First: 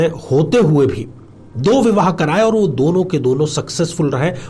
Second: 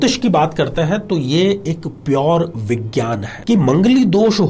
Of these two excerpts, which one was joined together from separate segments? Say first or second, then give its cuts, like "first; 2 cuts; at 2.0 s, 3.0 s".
second; 1 cut; at 3.3 s